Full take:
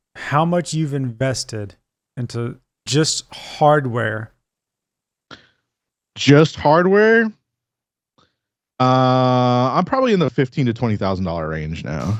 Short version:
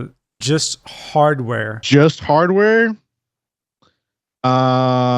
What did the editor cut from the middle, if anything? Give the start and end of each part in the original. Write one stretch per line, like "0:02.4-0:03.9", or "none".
0:04.2-0:06.1